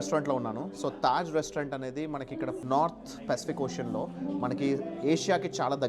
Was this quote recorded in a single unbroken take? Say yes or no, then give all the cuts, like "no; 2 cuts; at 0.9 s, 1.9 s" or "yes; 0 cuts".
no; 1 cut; at 2.6 s